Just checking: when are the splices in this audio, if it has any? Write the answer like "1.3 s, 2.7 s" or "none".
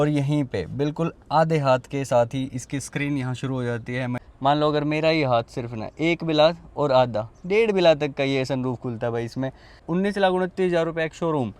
4.2 s, 9.8 s